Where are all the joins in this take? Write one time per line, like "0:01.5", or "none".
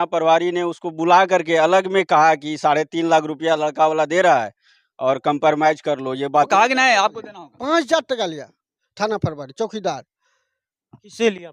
0:06.5